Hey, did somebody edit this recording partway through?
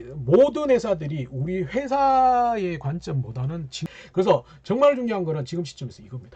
yes; 1 cut; at 3.8 s

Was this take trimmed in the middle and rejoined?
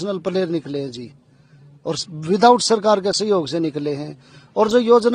no; 0 cuts

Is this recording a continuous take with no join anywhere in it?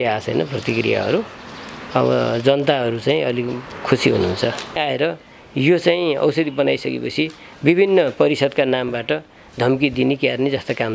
no; 1 cut; at 4.8 s

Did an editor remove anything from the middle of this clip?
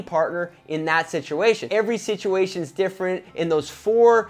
yes; 1 cut; at 1.7 s

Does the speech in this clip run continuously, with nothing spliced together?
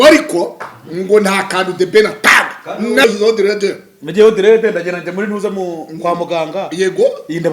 no; 1 cut; at 3.0 s

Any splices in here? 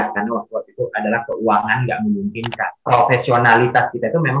yes; 1 cut; at 2.7 s

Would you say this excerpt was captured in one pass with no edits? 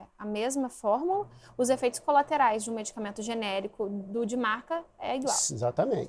yes; 0 cuts

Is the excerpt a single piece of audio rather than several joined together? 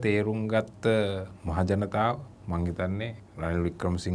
no; 2 cuts; at 2.3 s, 3.2 s

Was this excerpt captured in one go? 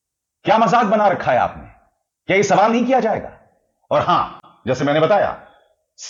yes; 0 cuts

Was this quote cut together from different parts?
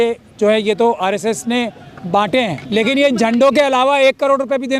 yes; 1 cut; at 2.6 s

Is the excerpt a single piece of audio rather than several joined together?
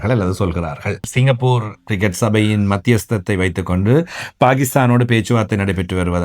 no; 1 cut; at 1.1 s

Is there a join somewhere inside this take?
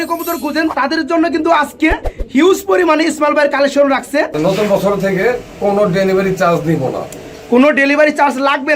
yes; 2 cuts; at 0.7 s, 4.3 s

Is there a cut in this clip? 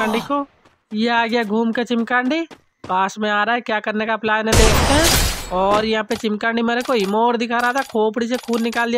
no; 0 cuts

